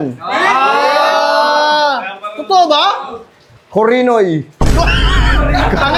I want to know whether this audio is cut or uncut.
uncut